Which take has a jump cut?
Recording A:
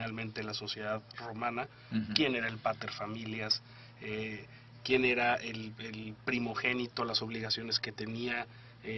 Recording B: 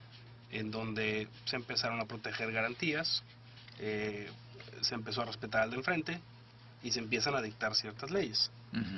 B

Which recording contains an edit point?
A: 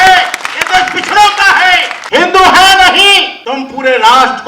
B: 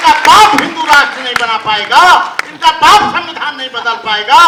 A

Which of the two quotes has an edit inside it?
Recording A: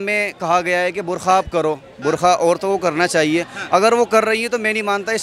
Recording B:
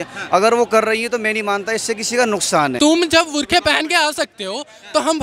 B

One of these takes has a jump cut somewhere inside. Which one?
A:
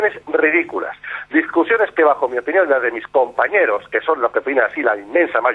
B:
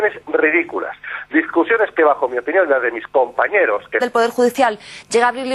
A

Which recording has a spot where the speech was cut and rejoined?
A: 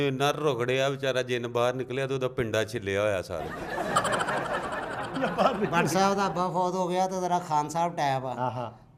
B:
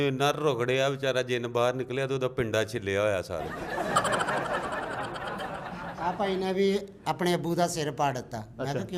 A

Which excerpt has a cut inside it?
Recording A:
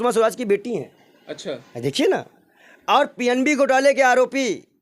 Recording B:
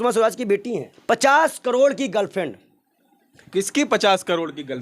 B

